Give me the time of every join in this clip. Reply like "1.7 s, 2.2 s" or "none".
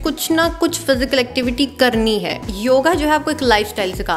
2.4 s

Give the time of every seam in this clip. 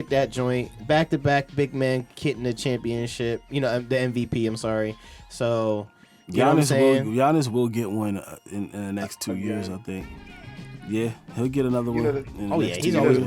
none

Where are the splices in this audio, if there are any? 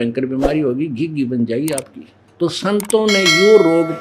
2.2 s

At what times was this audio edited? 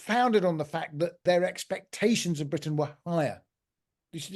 1.2 s

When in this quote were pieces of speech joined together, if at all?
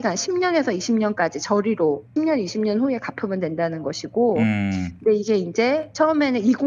2.1 s

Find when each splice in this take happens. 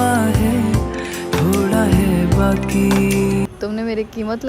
3.5 s

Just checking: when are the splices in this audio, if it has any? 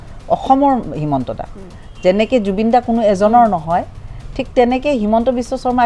none

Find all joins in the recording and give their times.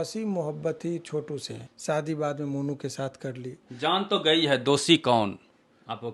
1.6 s, 3.6 s

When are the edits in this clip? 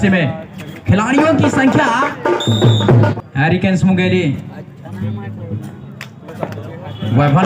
3.1 s

